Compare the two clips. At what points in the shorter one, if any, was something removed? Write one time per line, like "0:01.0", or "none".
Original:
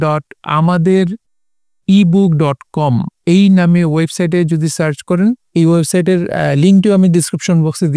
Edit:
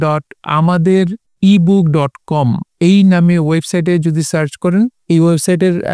0:01.2